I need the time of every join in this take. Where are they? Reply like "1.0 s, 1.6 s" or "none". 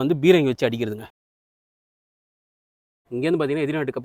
none